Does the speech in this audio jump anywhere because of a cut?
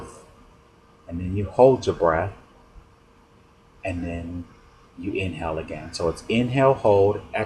yes; 1 cut; at 5.7 s

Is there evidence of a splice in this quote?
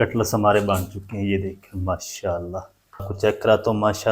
yes; 1 cut; at 3.1 s

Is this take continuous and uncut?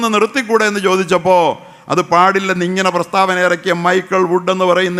yes; 0 cuts

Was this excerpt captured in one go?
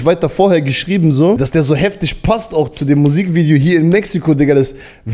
no; 1 cut; at 1.4 s

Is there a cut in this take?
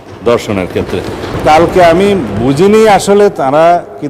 yes; 1 cut; at 1.3 s

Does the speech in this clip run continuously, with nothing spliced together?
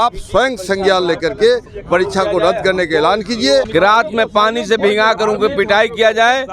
no; 1 cut; at 3.7 s

